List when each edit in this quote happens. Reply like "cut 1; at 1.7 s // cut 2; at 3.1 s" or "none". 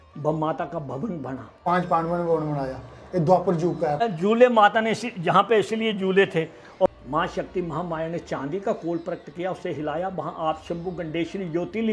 cut 1; at 1.5 s // cut 2; at 4.0 s // cut 3; at 6.9 s